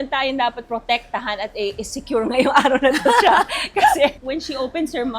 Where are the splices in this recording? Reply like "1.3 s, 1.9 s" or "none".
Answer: 4.2 s